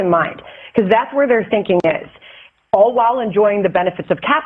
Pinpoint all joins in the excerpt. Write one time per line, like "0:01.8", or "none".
0:03.5